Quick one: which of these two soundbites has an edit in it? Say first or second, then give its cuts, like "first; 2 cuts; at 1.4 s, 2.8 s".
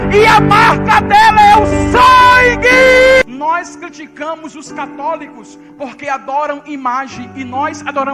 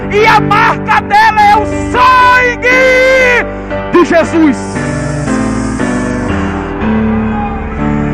first; 1 cut; at 3.2 s